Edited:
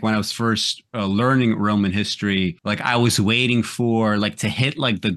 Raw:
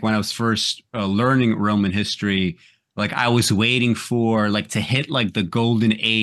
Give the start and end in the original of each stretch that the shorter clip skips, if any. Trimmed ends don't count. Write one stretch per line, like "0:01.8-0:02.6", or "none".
0:02.6-0:02.9